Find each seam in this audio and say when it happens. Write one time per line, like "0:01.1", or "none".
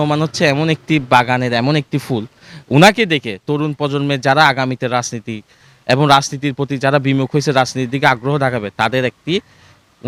none